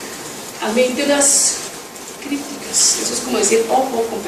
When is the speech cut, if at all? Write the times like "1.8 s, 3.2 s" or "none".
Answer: none